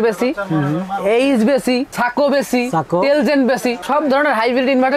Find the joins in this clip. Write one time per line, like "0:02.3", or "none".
none

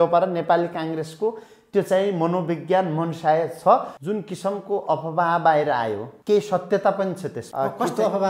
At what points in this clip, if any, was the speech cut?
0:03.9
0:06.1
0:07.4

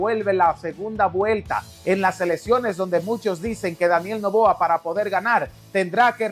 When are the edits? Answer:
none

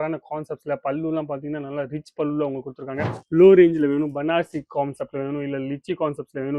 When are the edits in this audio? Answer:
0:03.2

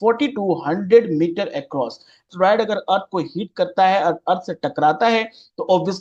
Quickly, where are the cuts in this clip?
0:02.3

